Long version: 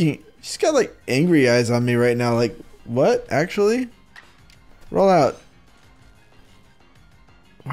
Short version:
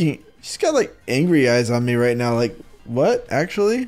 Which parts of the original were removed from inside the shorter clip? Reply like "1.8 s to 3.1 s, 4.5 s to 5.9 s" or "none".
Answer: none